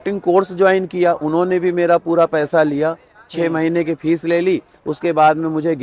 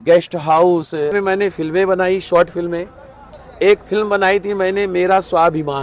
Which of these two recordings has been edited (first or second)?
second